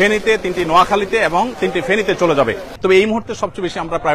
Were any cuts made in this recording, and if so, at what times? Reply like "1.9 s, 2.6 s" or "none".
2.7 s